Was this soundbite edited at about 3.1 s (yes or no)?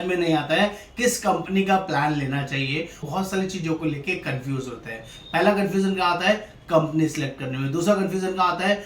yes